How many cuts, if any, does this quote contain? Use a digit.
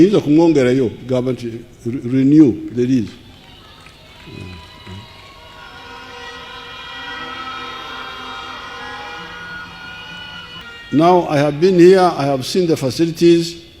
1